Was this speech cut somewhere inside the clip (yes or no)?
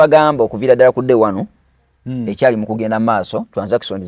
no